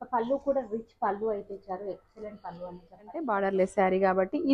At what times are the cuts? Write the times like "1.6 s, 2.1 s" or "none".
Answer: 3.3 s